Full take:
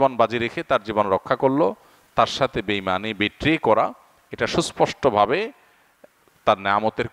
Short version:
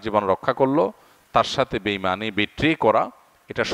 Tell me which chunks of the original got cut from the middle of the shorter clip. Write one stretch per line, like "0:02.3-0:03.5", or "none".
none